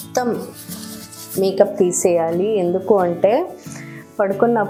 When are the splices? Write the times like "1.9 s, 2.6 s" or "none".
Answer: none